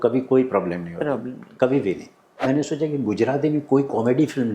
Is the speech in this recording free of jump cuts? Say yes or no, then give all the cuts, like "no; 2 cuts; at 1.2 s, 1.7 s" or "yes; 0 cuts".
no; 1 cut; at 2.4 s